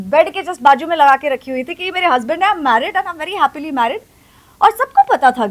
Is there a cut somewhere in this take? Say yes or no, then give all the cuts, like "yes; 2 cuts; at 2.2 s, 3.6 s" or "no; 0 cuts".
no; 0 cuts